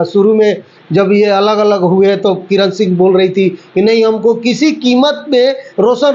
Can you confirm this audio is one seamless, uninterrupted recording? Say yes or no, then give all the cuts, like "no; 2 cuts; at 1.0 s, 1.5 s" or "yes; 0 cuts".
yes; 0 cuts